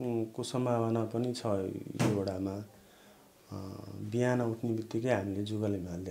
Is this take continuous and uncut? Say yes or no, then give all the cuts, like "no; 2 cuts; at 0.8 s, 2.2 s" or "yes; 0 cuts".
yes; 0 cuts